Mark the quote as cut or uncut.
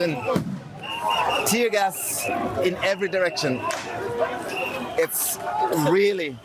uncut